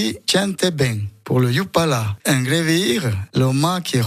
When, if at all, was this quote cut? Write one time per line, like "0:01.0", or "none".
0:02.1
0:03.2